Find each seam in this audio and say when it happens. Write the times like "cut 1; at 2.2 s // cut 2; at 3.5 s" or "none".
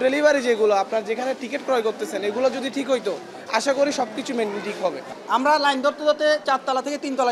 cut 1; at 5.0 s // cut 2; at 6.4 s